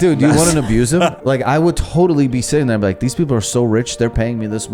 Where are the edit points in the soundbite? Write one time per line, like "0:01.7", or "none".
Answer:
none